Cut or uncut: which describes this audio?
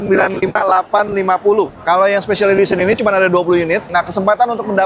cut